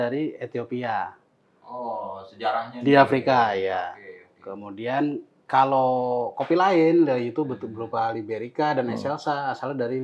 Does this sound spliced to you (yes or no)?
no